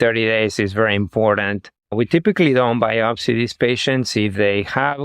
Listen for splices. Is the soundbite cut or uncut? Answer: uncut